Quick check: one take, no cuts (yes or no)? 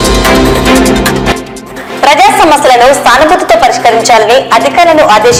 yes